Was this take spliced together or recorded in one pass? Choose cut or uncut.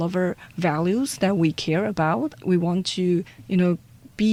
uncut